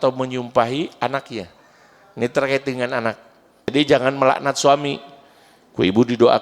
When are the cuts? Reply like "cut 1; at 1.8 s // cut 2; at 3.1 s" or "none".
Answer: cut 1; at 3.7 s